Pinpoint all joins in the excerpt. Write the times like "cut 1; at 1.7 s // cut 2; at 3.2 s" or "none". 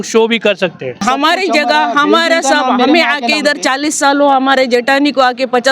cut 1; at 1.0 s